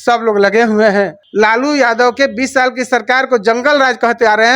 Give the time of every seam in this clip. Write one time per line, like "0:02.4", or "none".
0:01.2